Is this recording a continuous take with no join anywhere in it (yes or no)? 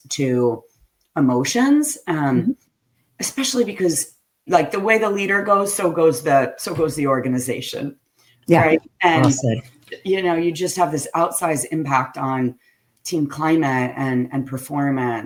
yes